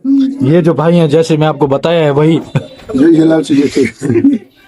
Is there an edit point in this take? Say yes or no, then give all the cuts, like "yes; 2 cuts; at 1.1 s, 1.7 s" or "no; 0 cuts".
no; 0 cuts